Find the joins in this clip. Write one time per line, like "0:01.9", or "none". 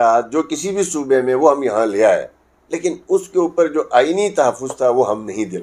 none